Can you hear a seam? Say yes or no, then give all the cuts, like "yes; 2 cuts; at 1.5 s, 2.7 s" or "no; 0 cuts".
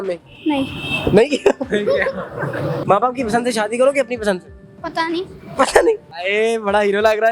yes; 2 cuts; at 2.8 s, 6.2 s